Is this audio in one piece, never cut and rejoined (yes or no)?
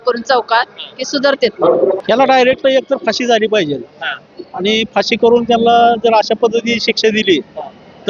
no